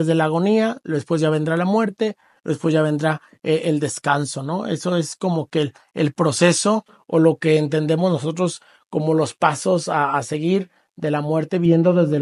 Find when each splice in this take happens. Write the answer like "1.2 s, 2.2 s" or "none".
none